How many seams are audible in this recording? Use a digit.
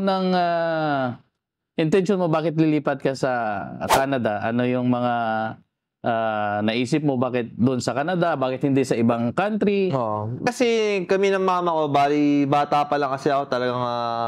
1